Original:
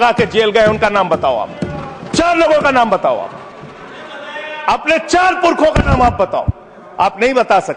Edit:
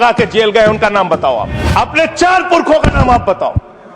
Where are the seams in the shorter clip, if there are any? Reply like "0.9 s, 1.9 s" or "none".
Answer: 1.6 s